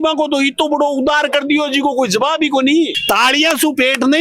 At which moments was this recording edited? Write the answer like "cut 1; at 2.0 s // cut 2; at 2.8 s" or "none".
cut 1; at 3.0 s

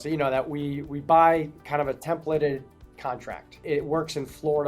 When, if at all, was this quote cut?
cut 1; at 3.6 s

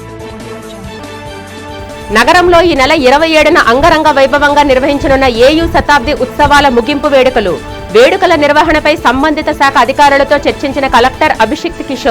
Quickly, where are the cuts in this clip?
cut 1; at 1.0 s

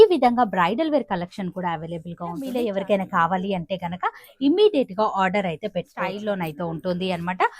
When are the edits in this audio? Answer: cut 1; at 2.6 s // cut 2; at 6.2 s

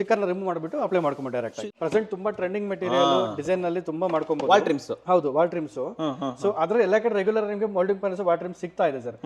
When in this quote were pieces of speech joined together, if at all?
cut 1; at 1.6 s

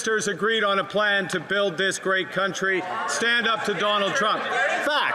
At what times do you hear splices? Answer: none

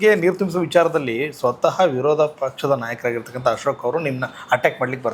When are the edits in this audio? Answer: none

